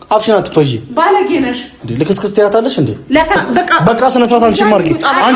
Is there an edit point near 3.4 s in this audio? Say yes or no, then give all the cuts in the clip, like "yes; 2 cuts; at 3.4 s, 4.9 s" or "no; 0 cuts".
no; 0 cuts